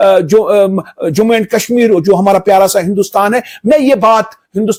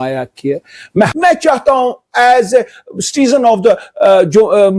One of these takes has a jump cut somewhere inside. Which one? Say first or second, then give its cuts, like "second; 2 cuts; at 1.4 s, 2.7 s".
second; 1 cut; at 1.6 s